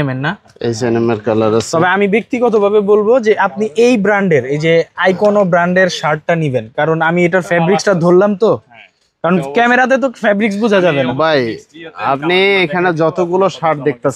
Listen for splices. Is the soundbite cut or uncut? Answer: uncut